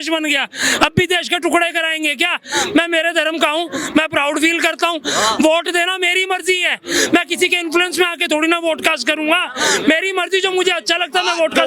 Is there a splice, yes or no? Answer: no